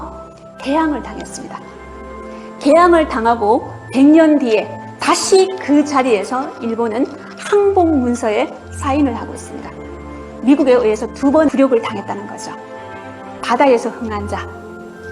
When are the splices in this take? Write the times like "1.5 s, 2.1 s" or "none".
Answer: 13.3 s